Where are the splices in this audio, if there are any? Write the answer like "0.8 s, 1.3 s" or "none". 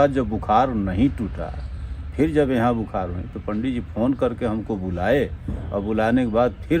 none